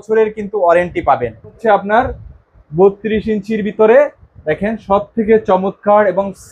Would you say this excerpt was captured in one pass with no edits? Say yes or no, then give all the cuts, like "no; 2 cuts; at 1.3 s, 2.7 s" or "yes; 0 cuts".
no; 1 cut; at 1.6 s